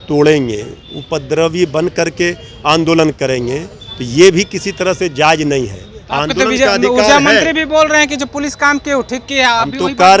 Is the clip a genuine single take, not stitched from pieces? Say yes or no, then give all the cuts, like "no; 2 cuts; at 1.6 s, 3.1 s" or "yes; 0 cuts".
yes; 0 cuts